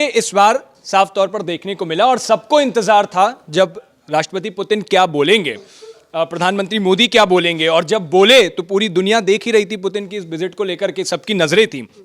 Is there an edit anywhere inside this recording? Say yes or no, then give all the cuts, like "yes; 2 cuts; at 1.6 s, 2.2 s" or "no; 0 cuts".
no; 0 cuts